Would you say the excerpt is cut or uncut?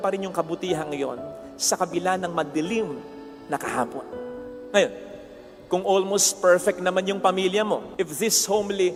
uncut